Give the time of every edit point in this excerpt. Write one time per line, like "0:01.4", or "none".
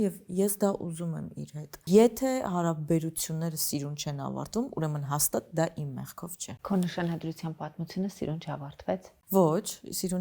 0:01.8
0:06.5
0:09.1